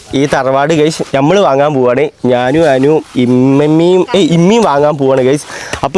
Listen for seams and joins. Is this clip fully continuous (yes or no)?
yes